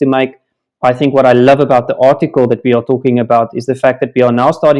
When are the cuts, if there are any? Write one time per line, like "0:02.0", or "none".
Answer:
none

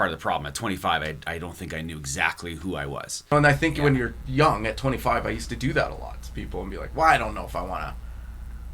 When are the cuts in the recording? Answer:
0:03.3

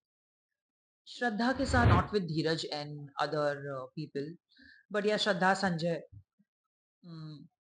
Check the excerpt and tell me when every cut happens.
0:01.9

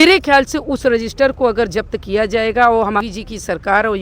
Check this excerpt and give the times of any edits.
0:03.0

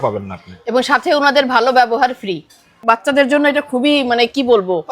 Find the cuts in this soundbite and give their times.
0:02.8

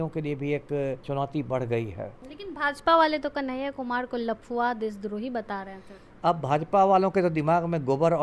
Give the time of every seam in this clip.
0:01.0
0:02.3

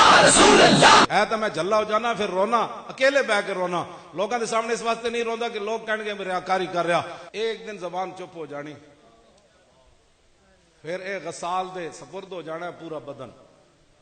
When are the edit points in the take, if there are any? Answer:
0:01.0
0:07.2

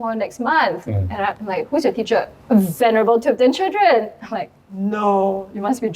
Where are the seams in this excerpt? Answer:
0:02.4

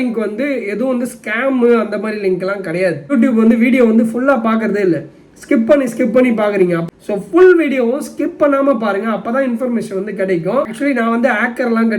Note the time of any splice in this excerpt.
0:03.1
0:06.9
0:10.7

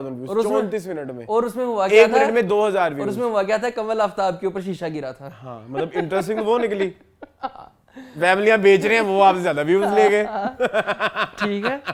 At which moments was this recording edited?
none

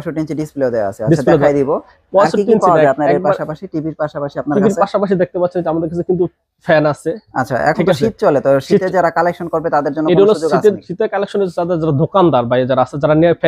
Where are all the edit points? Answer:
none

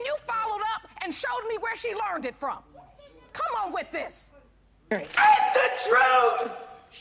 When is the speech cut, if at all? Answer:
0:04.9

